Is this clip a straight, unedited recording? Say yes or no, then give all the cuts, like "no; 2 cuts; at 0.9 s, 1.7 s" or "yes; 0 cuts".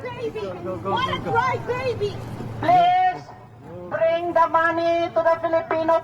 no; 2 cuts; at 1.4 s, 3.4 s